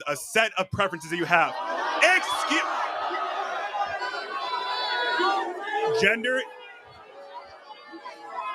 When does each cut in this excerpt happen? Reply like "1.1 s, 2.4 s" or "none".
5.7 s